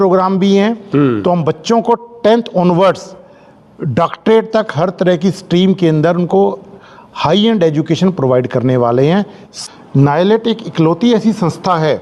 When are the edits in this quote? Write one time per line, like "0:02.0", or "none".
0:09.6